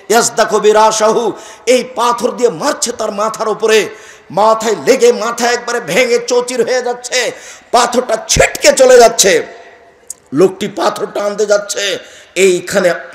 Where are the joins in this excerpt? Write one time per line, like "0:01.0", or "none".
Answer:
none